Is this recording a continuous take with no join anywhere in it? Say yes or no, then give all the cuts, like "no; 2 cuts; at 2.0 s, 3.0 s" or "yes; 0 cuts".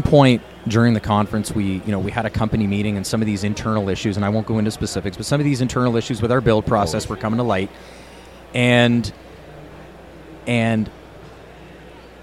yes; 0 cuts